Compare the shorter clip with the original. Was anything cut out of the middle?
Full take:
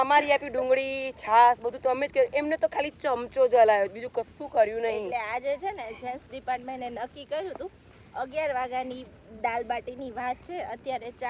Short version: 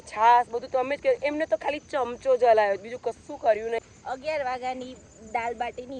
yes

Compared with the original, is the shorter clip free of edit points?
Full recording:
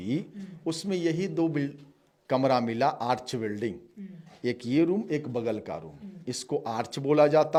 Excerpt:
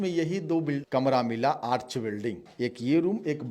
no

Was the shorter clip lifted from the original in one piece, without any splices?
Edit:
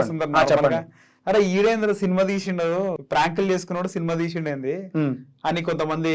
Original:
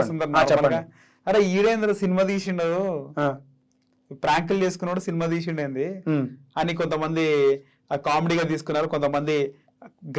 no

